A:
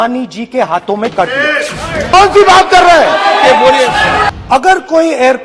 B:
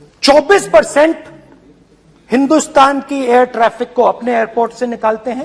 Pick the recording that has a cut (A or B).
A